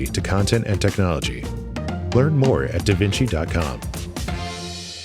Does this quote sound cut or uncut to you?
cut